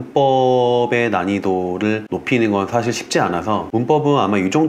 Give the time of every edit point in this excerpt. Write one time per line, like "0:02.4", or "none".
0:02.1
0:03.7